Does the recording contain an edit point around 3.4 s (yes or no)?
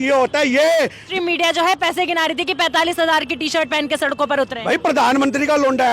no